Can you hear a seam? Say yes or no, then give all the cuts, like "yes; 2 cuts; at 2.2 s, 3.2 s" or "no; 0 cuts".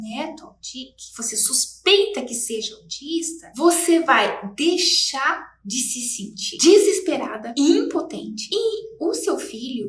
no; 0 cuts